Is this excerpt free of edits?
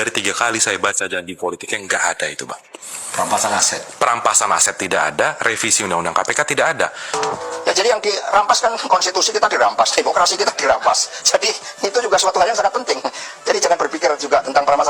no; 1 cut; at 7.0 s

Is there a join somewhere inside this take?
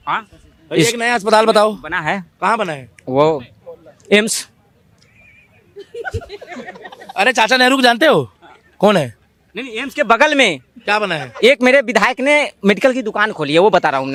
no; 0 cuts

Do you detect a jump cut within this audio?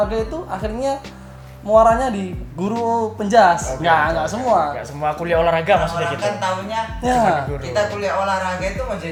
no; 0 cuts

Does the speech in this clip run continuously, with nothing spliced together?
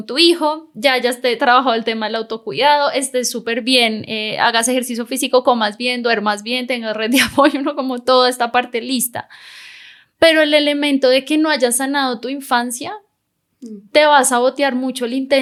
yes; 0 cuts

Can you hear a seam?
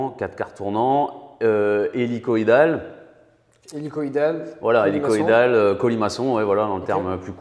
no; 0 cuts

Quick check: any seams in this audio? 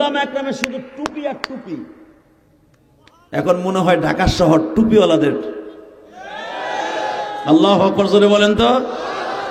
no; 0 cuts

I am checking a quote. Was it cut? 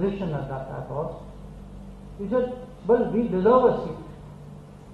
no; 0 cuts

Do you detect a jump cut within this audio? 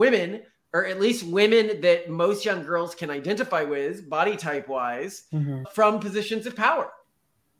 no; 0 cuts

